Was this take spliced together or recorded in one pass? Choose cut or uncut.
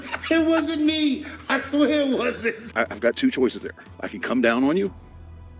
cut